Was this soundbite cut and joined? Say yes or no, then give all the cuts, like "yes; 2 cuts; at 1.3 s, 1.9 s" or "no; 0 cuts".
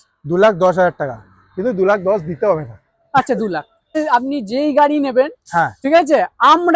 yes; 1 cut; at 4.0 s